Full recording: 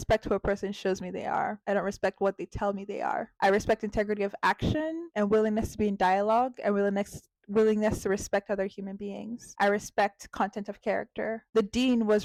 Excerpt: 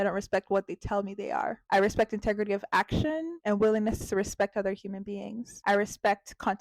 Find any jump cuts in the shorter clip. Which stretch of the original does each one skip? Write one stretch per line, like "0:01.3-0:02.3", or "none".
0:05.7-0:08.0

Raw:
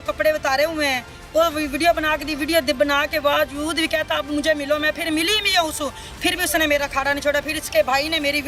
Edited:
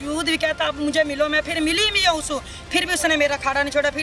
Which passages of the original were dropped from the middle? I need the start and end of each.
none

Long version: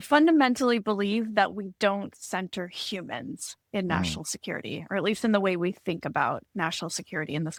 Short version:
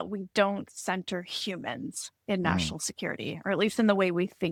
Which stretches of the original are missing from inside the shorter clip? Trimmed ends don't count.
none

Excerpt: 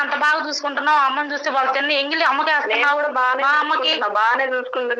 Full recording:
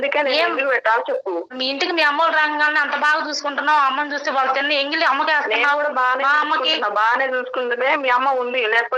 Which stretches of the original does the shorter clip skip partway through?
none

